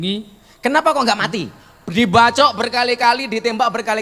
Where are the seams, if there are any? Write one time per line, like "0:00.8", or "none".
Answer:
none